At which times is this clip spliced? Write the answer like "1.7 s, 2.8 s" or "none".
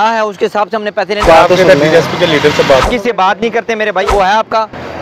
1.2 s, 2.8 s, 4.1 s